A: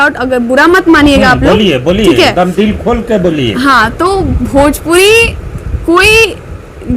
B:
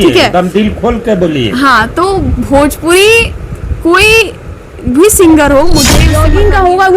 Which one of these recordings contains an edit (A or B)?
B